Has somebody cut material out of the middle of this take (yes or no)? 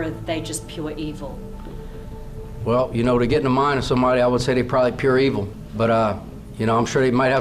yes